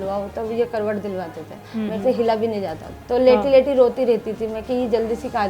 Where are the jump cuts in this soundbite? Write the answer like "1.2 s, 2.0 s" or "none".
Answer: 2.9 s